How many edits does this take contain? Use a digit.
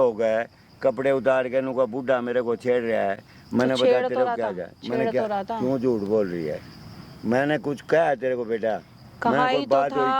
0